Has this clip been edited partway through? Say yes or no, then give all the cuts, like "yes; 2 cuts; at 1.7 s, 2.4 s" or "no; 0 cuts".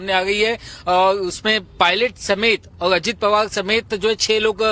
yes; 1 cut; at 1.4 s